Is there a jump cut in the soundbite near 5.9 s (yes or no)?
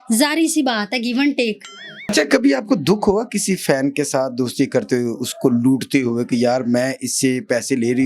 no